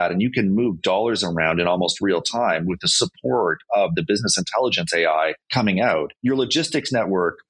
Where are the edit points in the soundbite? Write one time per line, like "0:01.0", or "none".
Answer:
0:05.4
0:06.1